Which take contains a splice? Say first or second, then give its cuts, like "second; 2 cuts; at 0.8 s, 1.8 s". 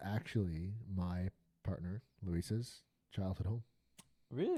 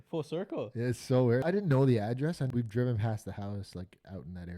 second; 2 cuts; at 1.4 s, 2.5 s